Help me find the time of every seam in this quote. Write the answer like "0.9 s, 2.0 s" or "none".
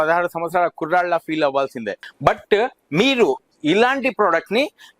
2.0 s